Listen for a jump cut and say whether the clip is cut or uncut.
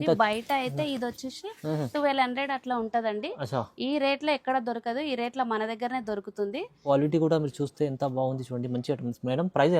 cut